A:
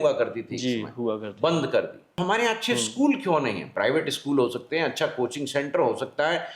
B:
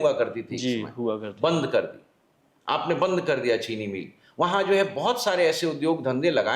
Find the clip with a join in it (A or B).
A